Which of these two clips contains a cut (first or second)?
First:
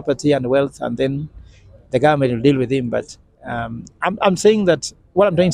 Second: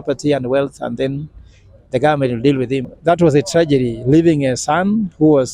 second